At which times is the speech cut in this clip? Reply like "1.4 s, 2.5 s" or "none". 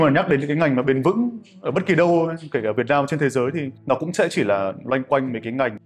none